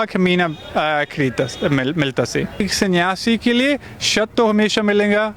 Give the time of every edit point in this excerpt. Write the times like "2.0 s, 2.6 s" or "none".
2.6 s